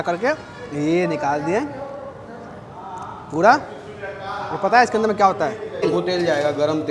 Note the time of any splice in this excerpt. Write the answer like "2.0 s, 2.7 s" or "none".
5.9 s